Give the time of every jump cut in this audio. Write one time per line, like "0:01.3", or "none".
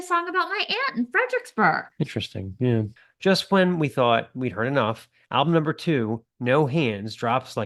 0:03.0

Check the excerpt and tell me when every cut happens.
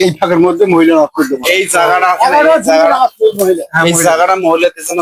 none

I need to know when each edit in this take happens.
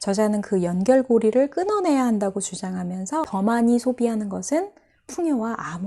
0:03.3

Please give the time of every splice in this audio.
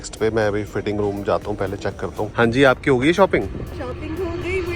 0:02.2

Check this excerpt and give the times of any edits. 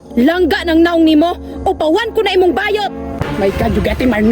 0:03.2

